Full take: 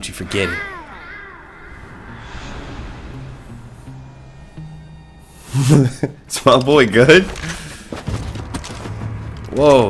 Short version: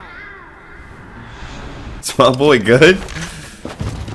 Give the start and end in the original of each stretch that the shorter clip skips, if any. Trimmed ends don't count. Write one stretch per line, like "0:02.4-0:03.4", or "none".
0:02.9-0:06.3